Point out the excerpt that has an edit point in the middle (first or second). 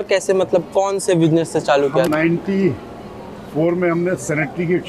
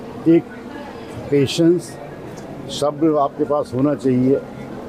first